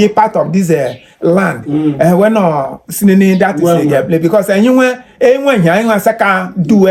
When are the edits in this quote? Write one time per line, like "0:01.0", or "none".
none